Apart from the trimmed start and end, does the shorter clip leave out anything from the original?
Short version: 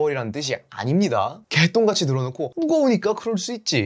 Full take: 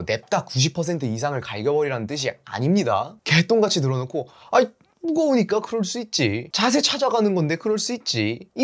yes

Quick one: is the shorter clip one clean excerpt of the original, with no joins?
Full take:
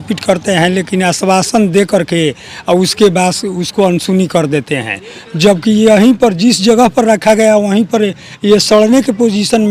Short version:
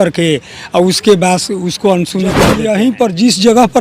no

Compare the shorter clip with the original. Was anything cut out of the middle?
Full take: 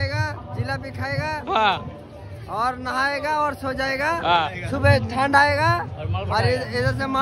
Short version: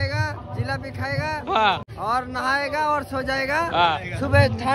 yes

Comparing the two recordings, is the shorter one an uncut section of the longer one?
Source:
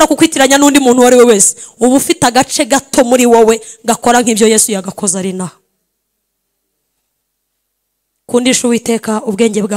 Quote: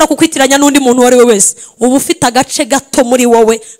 yes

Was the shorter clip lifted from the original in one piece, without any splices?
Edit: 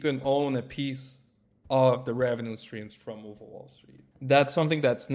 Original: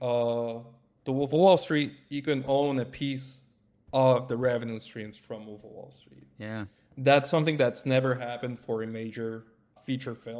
no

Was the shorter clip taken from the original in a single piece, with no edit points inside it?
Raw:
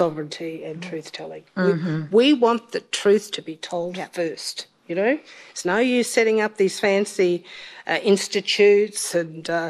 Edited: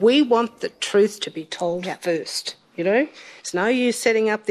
yes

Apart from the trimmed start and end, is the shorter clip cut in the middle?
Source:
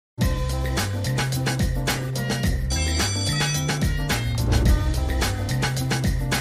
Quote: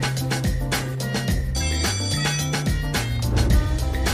no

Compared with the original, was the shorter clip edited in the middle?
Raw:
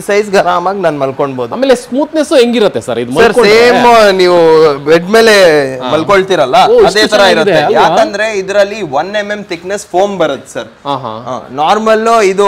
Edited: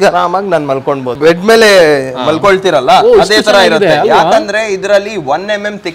yes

